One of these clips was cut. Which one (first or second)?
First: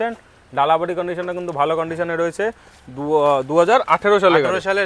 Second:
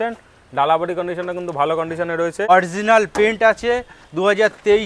second